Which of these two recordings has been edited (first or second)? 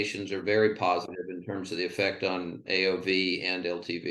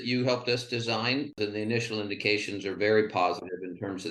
second